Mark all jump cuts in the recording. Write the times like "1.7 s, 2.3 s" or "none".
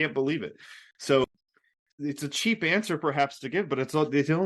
2.0 s